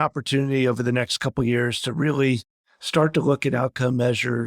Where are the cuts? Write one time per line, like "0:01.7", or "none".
none